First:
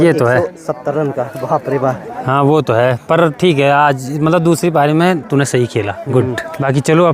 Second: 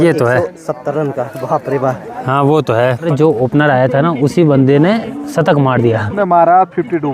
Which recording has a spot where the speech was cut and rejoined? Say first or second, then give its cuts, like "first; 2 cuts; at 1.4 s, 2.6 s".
second; 2 cuts; at 3.1 s, 6.1 s